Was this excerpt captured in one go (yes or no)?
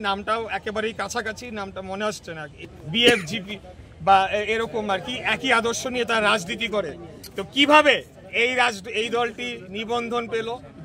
yes